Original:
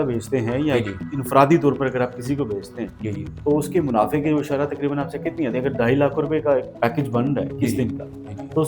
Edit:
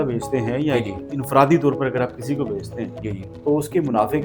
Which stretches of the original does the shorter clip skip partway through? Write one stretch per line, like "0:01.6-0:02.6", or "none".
none